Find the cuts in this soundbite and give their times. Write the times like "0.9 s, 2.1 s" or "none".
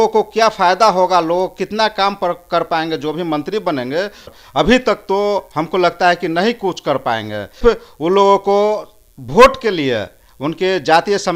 4.3 s, 7.6 s